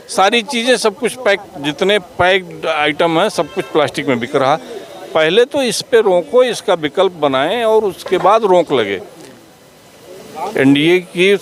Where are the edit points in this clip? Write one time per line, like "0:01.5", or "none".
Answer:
none